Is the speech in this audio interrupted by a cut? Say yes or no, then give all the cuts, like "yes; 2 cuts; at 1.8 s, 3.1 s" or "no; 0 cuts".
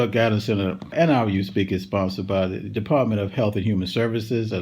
yes; 1 cut; at 0.9 s